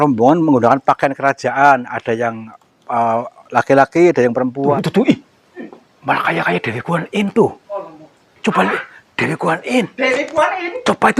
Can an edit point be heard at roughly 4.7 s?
yes; 1 cut; at 4.7 s

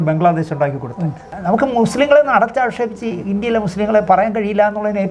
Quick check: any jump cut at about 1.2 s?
yes; 1 cut; at 1.2 s

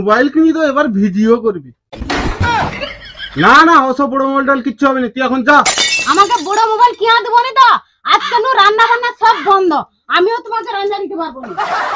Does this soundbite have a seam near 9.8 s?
no; 0 cuts

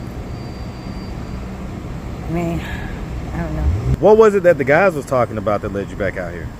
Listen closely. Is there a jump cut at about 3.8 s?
yes; 1 cut; at 3.8 s

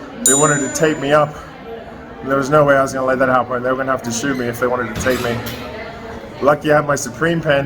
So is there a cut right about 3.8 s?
yes; 1 cut; at 3.8 s

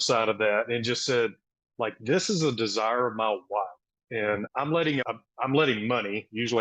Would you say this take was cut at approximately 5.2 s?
yes; 1 cut; at 5.2 s

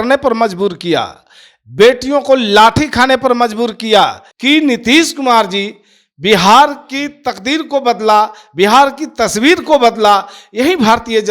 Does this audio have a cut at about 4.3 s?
yes; 1 cut; at 4.3 s

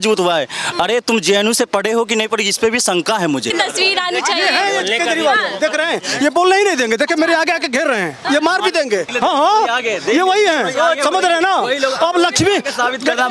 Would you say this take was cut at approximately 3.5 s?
yes; 1 cut; at 3.5 s

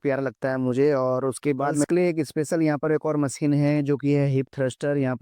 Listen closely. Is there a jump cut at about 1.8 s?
yes; 1 cut; at 1.8 s

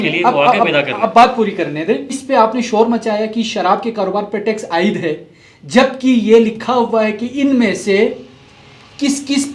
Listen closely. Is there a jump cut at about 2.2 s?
yes; 1 cut; at 2.2 s

